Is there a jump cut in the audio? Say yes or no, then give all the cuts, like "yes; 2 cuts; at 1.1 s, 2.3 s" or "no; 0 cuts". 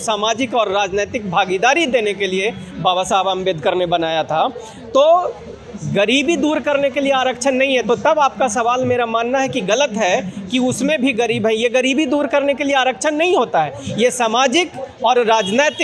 no; 0 cuts